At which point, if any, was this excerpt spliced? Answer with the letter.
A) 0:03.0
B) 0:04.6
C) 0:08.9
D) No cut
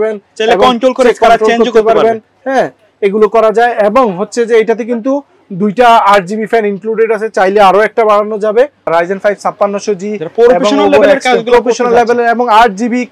C